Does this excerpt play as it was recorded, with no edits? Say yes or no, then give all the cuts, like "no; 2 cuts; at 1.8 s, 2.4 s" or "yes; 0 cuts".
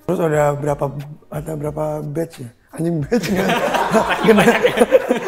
yes; 0 cuts